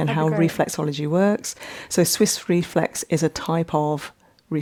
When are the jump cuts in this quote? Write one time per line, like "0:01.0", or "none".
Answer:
none